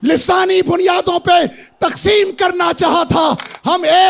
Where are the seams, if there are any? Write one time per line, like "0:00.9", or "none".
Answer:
none